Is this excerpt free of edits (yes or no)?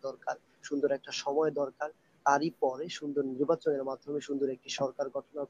yes